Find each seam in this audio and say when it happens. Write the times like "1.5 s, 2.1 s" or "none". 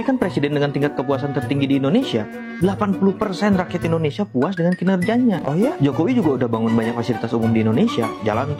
none